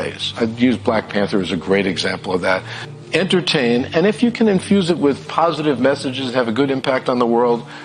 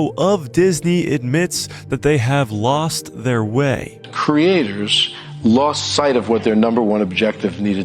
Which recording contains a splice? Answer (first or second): second